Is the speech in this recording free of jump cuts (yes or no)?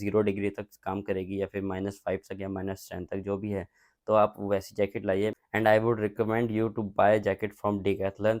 yes